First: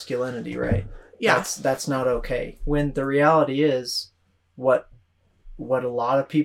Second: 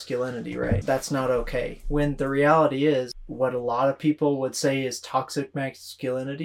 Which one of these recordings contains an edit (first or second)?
second